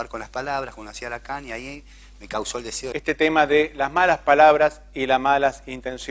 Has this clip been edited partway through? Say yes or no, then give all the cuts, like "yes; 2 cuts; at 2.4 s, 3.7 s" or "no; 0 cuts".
no; 0 cuts